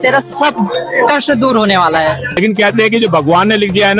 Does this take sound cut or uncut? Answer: cut